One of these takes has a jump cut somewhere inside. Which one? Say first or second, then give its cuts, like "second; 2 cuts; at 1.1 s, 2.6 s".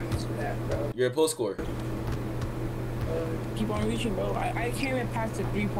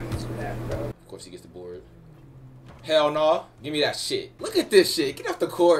second; 2 cuts; at 0.9 s, 4.4 s